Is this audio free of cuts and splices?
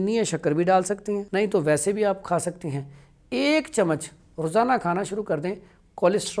no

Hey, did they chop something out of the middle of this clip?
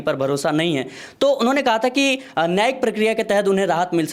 no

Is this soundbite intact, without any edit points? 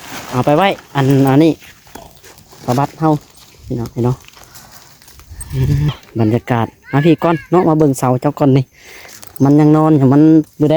no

